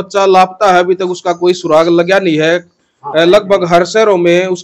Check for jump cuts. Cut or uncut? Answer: uncut